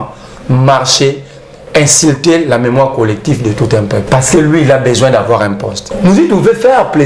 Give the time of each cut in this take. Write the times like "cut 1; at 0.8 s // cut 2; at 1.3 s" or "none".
cut 1; at 4.1 s // cut 2; at 5.8 s